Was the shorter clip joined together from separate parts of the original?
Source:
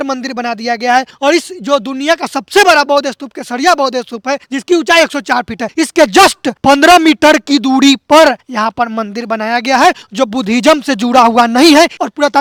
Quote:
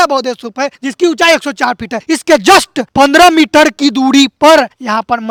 no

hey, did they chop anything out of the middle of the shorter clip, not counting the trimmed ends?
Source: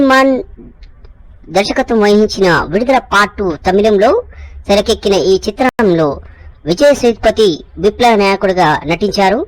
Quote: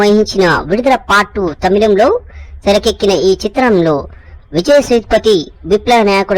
yes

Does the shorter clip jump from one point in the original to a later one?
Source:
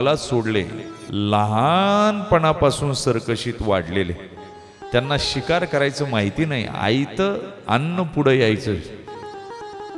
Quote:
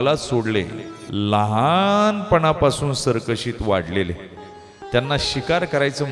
no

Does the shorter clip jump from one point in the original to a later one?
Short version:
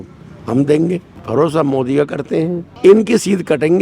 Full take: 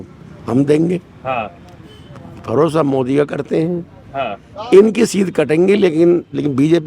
yes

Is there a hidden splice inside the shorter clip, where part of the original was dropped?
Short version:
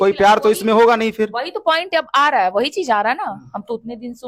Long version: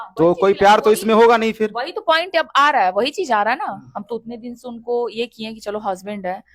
no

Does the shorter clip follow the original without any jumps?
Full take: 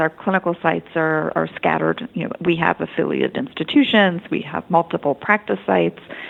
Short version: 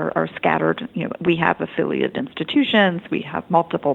yes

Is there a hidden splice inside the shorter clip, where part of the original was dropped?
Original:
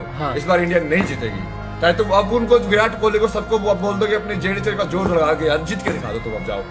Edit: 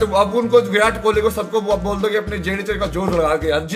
no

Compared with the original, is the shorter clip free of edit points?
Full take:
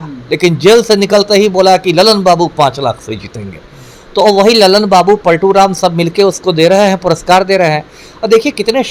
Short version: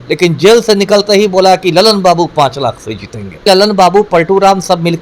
no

